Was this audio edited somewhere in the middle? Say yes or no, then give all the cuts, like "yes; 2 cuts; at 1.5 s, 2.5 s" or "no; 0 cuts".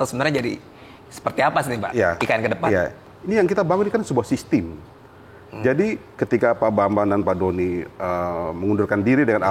yes; 1 cut; at 3.0 s